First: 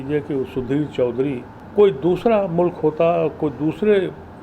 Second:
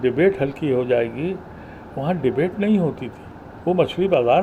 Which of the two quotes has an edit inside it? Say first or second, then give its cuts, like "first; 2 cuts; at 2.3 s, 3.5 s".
first; 1 cut; at 1.5 s